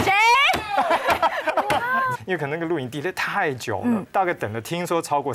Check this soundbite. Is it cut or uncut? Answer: cut